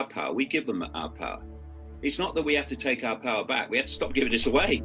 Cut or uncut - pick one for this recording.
uncut